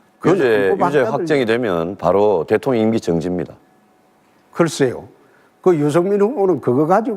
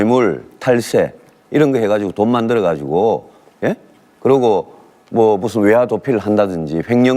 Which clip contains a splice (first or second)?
first